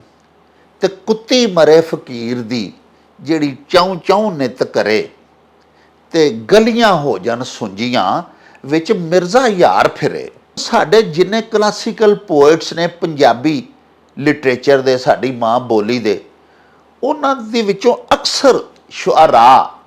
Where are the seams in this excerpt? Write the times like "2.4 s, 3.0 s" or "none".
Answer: 10.6 s